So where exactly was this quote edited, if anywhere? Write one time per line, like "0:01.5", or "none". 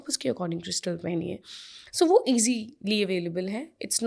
none